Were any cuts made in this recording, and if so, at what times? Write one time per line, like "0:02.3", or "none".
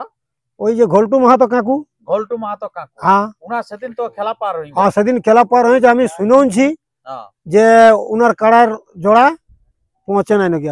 none